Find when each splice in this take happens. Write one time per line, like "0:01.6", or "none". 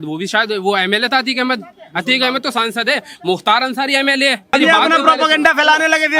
0:04.5